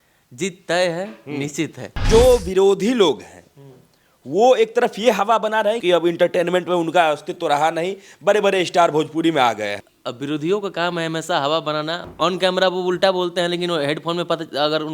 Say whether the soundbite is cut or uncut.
cut